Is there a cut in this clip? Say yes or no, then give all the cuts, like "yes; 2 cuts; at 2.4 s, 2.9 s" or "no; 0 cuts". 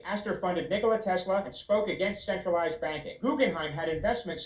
yes; 1 cut; at 3.6 s